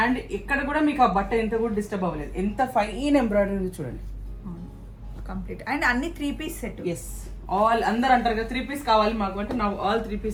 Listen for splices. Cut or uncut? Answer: uncut